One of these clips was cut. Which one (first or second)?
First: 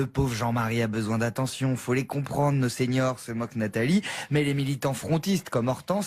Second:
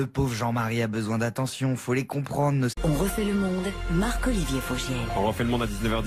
first